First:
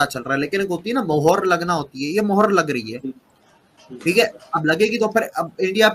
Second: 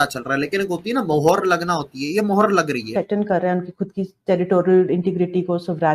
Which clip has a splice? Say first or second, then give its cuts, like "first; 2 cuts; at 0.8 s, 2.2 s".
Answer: second; 1 cut; at 2.9 s